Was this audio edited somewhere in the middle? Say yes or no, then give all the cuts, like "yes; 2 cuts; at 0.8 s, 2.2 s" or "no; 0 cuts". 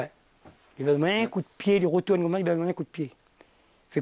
no; 0 cuts